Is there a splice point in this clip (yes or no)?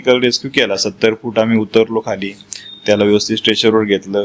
no